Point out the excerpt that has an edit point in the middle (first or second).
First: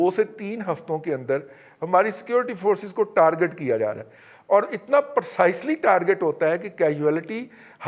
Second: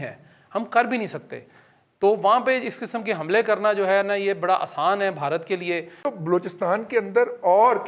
second